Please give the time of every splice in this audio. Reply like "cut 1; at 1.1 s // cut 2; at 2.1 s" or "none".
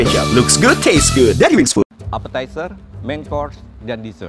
cut 1; at 2.0 s